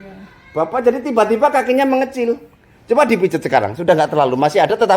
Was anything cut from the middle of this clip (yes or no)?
no